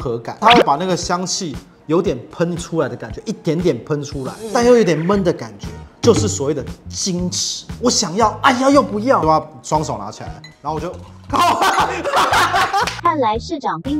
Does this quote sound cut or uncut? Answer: cut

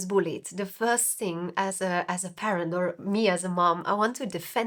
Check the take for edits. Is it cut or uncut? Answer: uncut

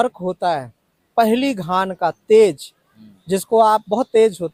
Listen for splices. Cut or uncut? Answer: uncut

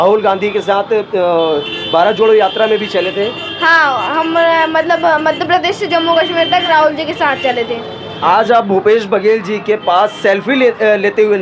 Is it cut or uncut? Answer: cut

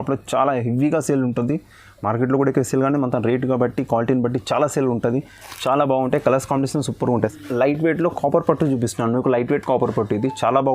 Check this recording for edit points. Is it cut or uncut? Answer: cut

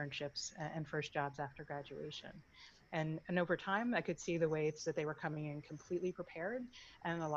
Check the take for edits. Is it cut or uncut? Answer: uncut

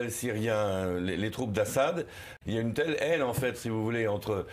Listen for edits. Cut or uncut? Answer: cut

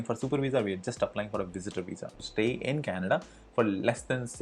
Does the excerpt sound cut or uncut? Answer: cut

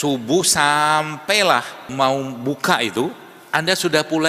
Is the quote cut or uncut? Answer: cut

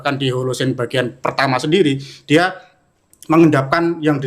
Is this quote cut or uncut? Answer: uncut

